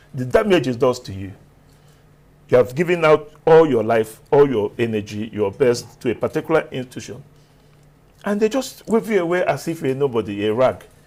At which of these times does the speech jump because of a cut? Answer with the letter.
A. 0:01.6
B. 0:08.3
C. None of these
C